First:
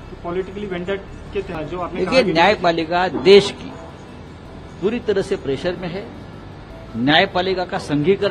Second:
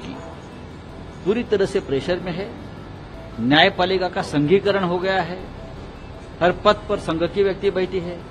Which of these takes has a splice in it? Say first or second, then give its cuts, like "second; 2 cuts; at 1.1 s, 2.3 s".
first; 1 cut; at 1.5 s